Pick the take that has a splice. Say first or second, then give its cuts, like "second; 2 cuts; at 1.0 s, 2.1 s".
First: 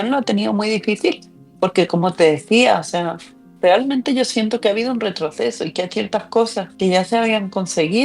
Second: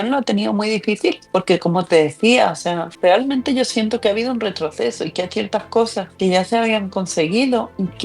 second; 2 cuts; at 1.2 s, 2.9 s